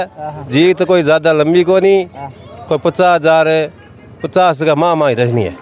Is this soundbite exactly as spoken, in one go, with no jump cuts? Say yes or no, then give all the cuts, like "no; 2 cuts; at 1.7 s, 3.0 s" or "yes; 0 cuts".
yes; 0 cuts